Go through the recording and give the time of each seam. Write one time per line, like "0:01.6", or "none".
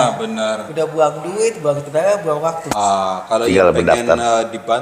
0:02.8